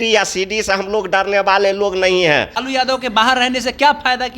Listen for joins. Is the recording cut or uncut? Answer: cut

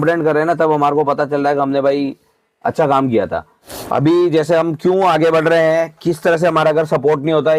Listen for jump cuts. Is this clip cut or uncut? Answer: cut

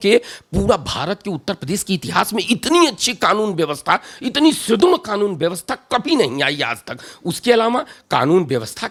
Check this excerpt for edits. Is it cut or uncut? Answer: uncut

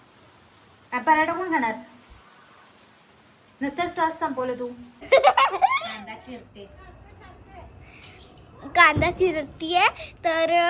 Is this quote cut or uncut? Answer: cut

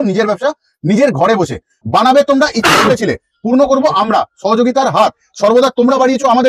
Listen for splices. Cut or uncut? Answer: cut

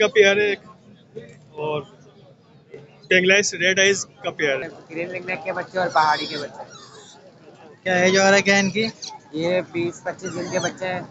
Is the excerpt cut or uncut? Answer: cut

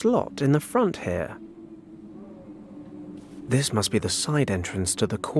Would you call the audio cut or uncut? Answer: cut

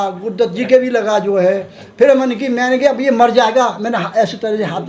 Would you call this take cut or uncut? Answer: uncut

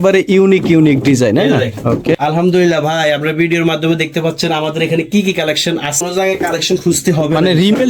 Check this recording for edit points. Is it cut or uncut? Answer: uncut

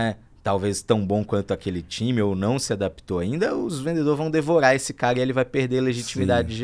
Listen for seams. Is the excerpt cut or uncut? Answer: uncut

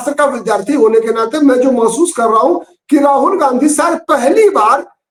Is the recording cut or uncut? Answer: uncut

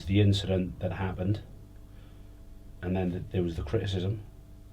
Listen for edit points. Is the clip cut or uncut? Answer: uncut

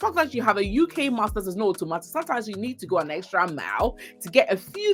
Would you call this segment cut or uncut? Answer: uncut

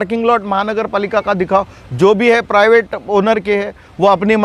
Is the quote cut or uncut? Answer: uncut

